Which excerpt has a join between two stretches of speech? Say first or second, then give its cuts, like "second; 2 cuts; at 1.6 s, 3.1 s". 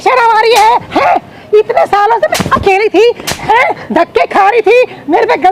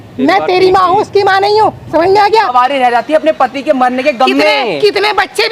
second; 1 cut; at 2.5 s